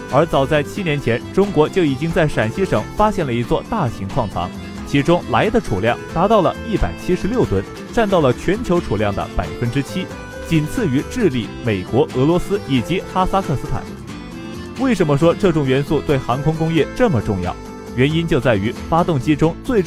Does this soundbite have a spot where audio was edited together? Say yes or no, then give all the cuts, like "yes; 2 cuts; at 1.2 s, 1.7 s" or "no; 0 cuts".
no; 0 cuts